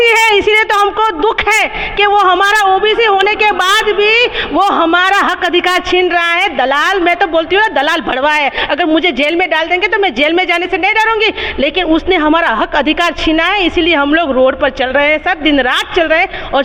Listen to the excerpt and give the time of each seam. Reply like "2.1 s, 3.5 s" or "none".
none